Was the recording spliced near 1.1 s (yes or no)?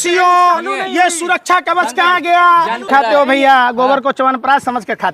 no